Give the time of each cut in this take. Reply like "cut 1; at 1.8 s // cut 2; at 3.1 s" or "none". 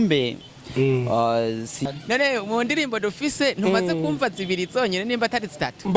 cut 1; at 1.8 s